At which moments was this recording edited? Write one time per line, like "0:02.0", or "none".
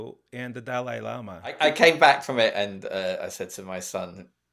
0:01.6